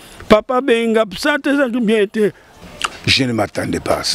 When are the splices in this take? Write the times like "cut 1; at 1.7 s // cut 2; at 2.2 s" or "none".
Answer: cut 1; at 2.5 s